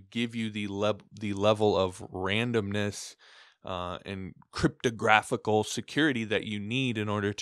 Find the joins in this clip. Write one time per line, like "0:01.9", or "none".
none

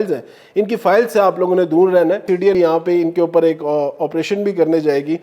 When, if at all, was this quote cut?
0:02.5

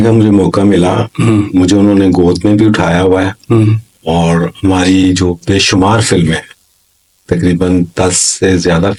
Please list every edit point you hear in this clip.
none

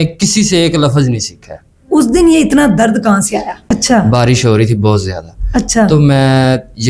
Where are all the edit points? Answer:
0:03.6

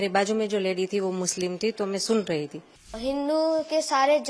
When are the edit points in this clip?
0:03.0

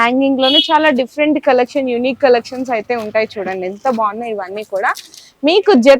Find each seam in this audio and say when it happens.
none

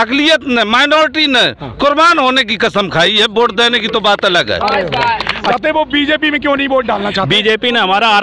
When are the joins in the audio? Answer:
0:05.5

